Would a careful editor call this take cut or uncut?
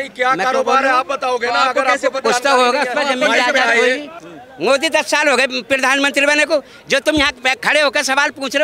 cut